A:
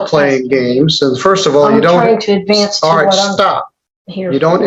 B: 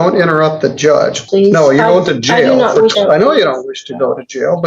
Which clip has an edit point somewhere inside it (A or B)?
B